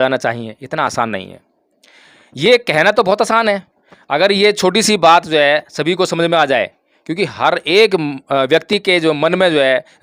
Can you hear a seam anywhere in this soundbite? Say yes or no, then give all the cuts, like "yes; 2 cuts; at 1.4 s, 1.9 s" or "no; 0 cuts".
no; 0 cuts